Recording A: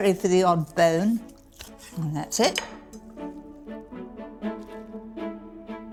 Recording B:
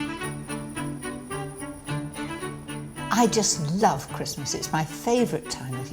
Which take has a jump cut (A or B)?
B